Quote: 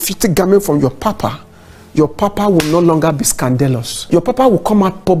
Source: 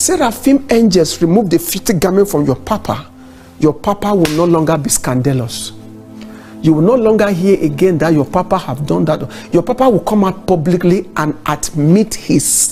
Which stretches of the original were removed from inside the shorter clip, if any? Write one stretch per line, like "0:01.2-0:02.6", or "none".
0:05.6-0:09.3